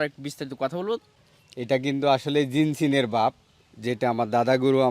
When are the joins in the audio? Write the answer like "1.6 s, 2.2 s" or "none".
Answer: 1.2 s